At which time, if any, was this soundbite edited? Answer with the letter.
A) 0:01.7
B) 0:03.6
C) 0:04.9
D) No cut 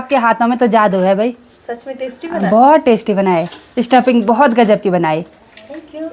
D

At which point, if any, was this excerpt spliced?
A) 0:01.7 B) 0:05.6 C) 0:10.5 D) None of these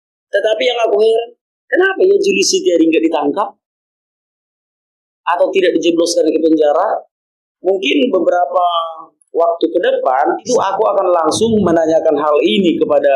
C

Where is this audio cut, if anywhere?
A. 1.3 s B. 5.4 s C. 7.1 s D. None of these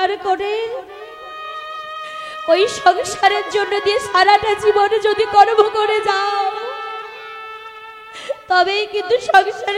D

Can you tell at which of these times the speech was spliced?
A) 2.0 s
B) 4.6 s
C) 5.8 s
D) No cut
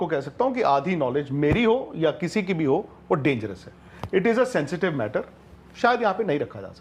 D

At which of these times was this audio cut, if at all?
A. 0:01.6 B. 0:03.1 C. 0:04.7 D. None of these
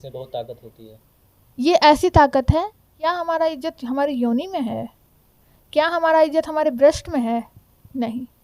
B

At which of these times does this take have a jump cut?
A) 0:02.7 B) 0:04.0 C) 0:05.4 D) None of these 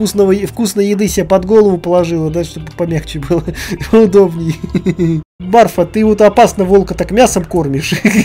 C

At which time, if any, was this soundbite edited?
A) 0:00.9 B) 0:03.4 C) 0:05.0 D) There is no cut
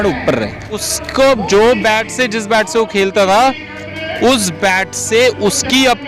A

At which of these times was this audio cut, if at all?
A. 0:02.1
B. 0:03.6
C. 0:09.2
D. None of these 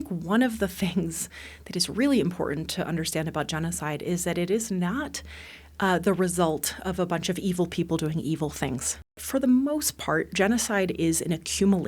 C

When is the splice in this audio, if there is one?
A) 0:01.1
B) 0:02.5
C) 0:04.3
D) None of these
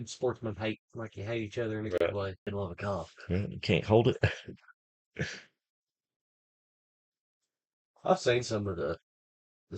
B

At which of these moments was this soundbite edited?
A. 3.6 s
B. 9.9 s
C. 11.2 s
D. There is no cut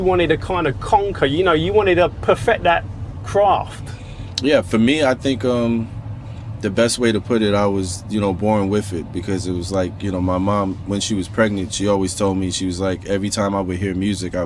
D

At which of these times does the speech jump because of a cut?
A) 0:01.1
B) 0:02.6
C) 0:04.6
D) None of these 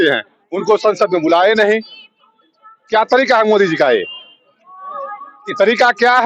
D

